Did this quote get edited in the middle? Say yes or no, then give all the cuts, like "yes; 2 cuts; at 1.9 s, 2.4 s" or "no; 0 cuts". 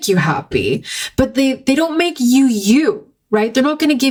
no; 0 cuts